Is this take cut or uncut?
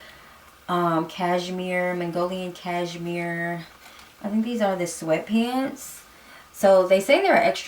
uncut